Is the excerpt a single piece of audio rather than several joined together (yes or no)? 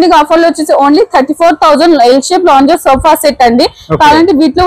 yes